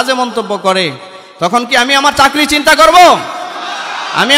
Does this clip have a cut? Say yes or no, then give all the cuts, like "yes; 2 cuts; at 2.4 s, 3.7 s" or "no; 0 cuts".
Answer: no; 0 cuts